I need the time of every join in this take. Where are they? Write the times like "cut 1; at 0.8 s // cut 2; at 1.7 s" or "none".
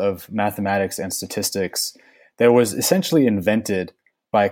none